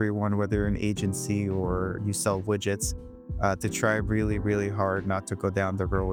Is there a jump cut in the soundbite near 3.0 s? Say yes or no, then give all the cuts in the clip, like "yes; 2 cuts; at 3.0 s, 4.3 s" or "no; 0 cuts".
no; 0 cuts